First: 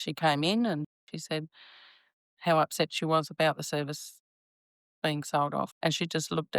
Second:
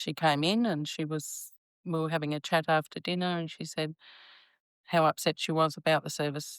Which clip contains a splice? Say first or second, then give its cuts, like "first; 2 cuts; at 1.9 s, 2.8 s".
first; 2 cuts; at 1.0 s, 5.7 s